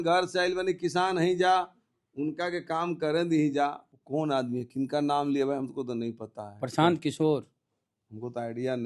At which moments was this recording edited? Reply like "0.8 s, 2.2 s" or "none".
3.9 s